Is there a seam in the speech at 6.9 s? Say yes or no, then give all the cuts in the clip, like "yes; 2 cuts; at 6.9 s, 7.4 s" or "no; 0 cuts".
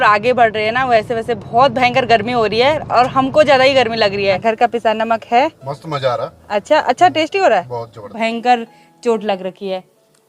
no; 2 cuts; at 4.4 s, 8.1 s